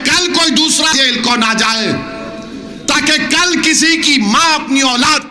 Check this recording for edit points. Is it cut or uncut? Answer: cut